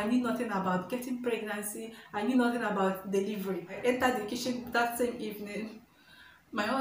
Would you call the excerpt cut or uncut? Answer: cut